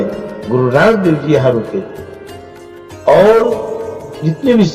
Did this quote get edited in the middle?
no; 0 cuts

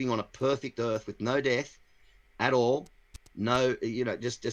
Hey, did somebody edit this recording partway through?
no; 0 cuts

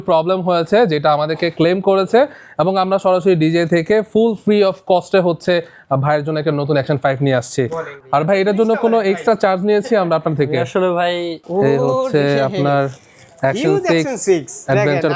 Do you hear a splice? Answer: yes; 2 cuts; at 7.9 s, 11.4 s

